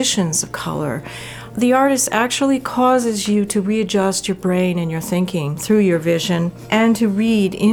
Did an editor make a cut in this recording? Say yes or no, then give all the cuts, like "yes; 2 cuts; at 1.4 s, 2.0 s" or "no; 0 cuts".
yes; 3 cuts; at 1.5 s, 5.6 s, 6.6 s